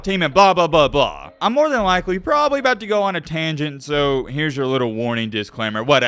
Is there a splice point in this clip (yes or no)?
yes